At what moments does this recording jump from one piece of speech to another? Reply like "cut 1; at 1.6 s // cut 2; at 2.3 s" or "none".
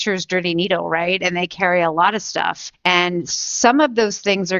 cut 1; at 2.6 s